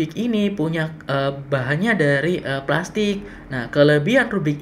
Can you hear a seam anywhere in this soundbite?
no; 0 cuts

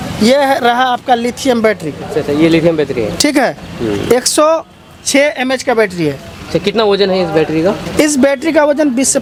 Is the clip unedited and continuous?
yes; 0 cuts

